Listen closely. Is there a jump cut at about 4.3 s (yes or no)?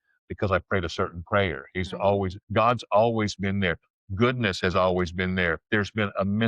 no